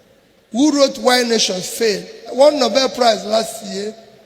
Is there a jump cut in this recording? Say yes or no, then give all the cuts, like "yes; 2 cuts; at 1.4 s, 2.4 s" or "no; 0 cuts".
yes; 1 cut; at 2.3 s